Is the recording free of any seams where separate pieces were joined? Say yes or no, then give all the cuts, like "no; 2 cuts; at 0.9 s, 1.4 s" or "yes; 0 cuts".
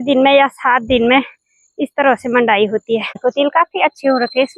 no; 1 cut; at 3.2 s